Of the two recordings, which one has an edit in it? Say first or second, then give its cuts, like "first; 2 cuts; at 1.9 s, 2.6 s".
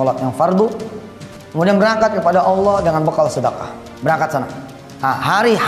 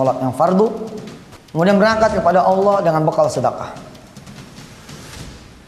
first; 1 cut; at 3.8 s